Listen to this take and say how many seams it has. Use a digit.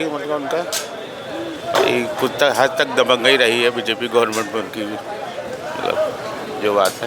0